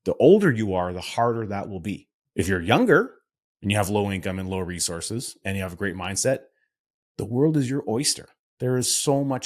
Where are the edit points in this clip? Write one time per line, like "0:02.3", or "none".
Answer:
0:02.1